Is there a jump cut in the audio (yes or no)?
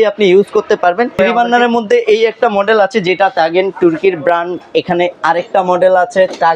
yes